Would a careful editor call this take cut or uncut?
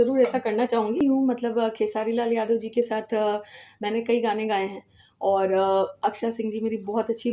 cut